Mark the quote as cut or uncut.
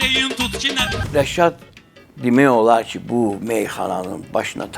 cut